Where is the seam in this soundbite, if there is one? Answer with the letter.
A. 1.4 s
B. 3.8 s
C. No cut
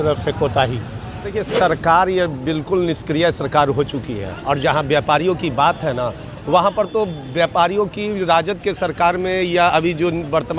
A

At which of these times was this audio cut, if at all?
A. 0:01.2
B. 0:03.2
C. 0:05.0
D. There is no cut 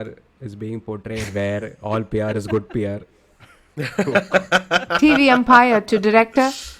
C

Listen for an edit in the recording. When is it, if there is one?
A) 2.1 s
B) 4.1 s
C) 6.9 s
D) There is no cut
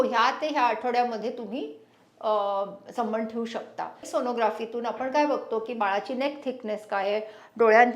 B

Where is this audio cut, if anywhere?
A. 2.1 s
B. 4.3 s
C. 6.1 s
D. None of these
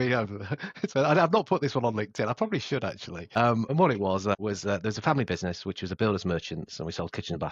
D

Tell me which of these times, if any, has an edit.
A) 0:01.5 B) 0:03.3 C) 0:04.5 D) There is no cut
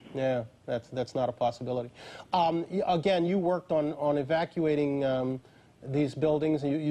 A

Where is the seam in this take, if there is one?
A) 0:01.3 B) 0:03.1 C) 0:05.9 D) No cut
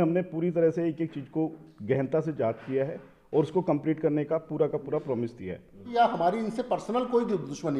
C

